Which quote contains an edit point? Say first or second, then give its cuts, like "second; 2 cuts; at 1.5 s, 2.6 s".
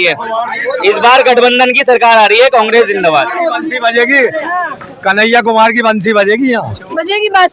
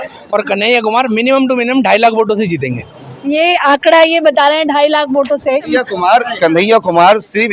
second; 1 cut; at 5.6 s